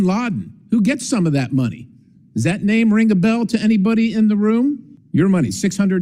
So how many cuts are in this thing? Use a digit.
1